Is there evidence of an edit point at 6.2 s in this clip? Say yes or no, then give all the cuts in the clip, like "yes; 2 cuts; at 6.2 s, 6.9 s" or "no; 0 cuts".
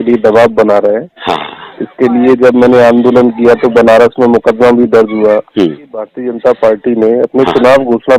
yes; 1 cut; at 6.2 s